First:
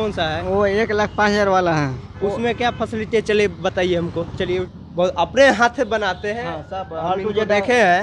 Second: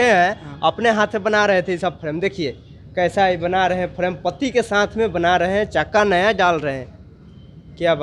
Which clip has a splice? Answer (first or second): first